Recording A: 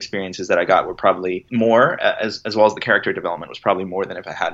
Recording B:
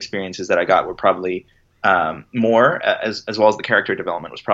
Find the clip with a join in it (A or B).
A